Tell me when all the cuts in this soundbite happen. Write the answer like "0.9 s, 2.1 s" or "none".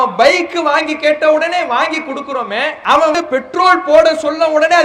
3.1 s